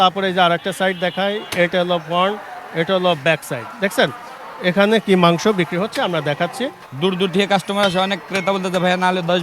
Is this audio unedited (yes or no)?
no